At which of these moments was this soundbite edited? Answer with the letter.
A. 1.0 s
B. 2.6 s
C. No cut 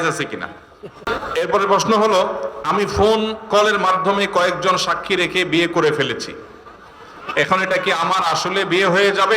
A